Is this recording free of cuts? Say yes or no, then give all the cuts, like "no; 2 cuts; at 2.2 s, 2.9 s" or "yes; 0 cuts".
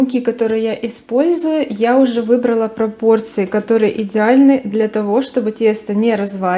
yes; 0 cuts